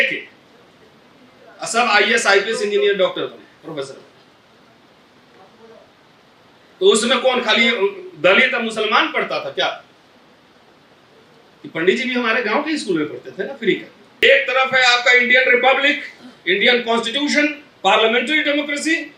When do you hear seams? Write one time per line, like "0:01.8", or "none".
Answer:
0:14.2

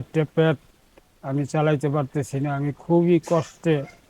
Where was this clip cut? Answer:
none

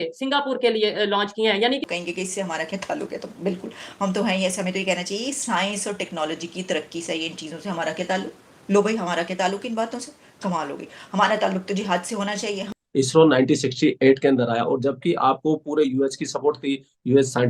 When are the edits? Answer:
0:01.8
0:12.7

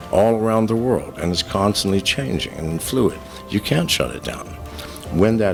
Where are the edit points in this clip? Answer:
none

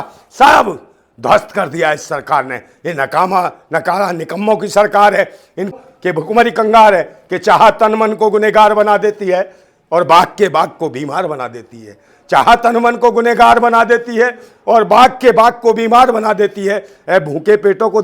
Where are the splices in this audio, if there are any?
0:05.7

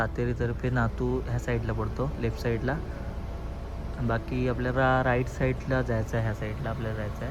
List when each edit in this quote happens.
none

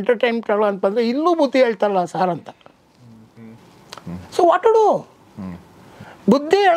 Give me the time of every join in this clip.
none

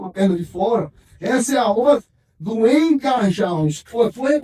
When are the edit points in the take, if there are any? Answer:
none

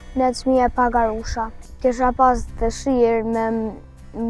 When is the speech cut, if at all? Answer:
0:01.7

